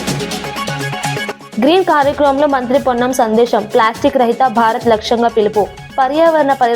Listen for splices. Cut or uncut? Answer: cut